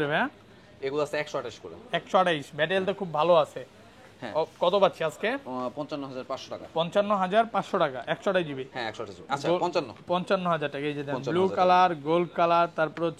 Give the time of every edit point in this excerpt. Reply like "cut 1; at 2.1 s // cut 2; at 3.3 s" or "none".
none